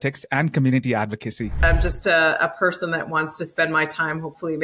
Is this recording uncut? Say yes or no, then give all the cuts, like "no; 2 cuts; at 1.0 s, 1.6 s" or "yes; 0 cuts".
no; 1 cut; at 1.6 s